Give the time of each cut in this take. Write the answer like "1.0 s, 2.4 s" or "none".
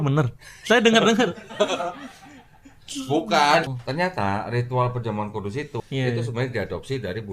3.7 s, 5.8 s